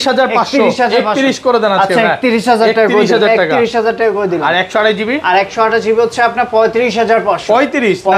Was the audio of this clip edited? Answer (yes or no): no